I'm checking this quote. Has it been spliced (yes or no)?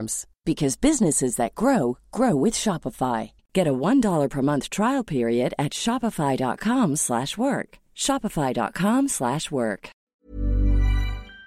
yes